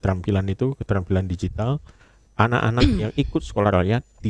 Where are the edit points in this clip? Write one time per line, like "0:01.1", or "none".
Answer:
none